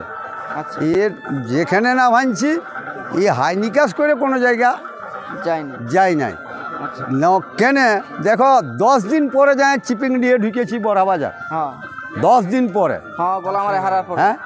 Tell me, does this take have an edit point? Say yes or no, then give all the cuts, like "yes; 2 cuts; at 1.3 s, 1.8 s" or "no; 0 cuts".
no; 0 cuts